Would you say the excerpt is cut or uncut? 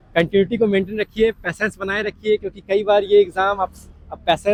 uncut